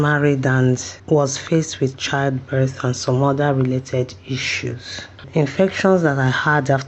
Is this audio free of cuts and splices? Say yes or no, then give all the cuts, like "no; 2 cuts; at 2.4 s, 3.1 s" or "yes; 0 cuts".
no; 2 cuts; at 0.9 s, 5.3 s